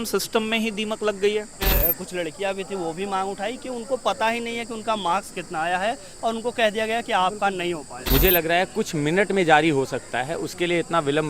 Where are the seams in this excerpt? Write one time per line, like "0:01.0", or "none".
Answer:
0:01.7
0:07.9